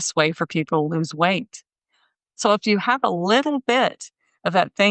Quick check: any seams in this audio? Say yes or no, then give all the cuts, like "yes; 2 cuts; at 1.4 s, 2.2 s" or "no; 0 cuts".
yes; 1 cut; at 2.3 s